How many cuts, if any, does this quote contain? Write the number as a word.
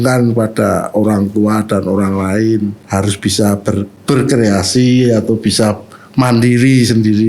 two